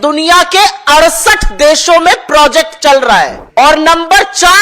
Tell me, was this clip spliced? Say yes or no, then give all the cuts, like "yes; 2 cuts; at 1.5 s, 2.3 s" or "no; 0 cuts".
yes; 1 cut; at 3.4 s